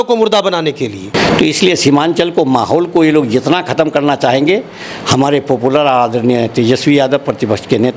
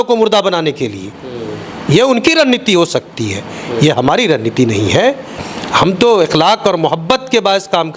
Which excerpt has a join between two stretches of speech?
first; 1 cut; at 1.1 s

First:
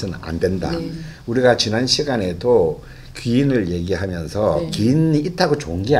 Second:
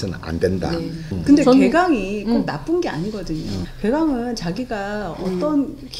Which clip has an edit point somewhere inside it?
second; 2 cuts; at 1.2 s, 3.6 s

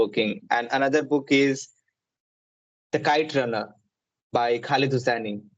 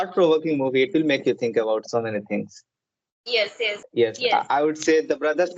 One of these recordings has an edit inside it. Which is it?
second; 1 cut; at 3.8 s

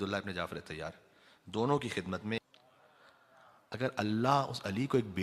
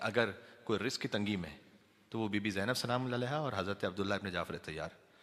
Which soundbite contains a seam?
first; 1 cut; at 2.4 s

